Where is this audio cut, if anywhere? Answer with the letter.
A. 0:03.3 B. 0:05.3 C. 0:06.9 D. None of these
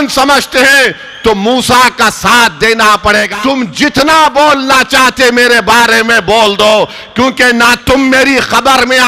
A